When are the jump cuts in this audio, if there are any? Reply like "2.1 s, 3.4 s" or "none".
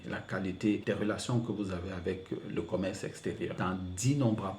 0.8 s, 3.5 s